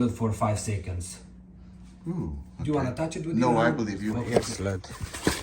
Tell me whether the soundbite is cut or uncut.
cut